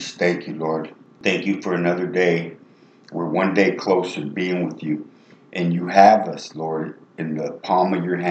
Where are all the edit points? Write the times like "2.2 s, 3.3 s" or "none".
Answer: 1.0 s